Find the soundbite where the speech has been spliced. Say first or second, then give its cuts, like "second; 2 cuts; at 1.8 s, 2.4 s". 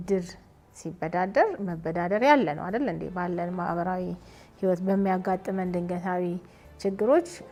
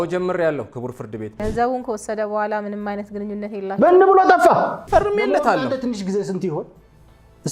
second; 2 cuts; at 1.6 s, 4.8 s